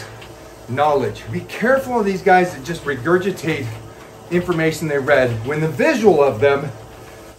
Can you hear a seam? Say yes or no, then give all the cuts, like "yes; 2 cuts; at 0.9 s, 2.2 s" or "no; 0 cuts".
yes; 3 cuts; at 1.3 s, 2.7 s, 5.4 s